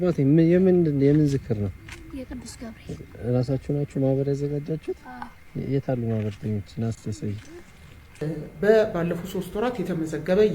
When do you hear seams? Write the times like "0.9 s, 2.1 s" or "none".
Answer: 8.3 s